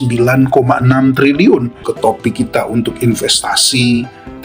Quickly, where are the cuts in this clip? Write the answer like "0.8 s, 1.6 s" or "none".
1.8 s